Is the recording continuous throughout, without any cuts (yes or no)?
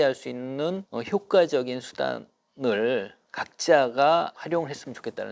no